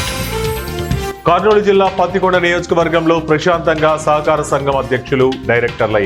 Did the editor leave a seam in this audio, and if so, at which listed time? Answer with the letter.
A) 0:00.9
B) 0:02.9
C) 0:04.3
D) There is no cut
A